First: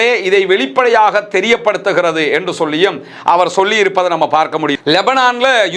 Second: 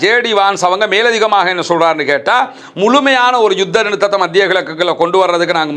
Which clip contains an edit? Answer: first; 1 cut; at 4.7 s

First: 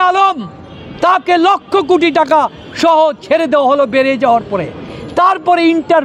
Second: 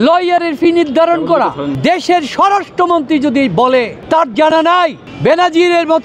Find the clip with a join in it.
second; 3 cuts; at 1.7 s, 4.0 s, 5.0 s

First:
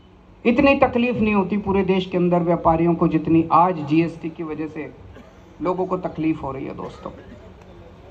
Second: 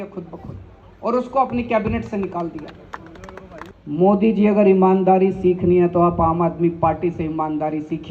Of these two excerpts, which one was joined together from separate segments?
second; 1 cut; at 3.6 s

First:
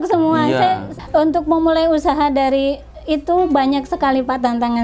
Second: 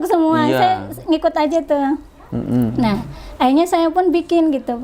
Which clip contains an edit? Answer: first; 1 cut; at 0.9 s

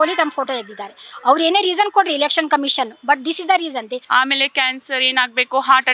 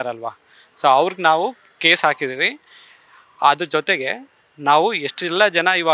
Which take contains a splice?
first; 1 cut; at 4.0 s

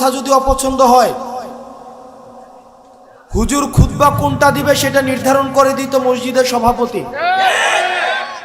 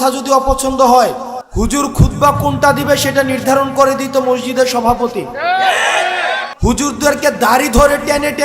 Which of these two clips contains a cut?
second; 2 cuts; at 1.4 s, 6.5 s

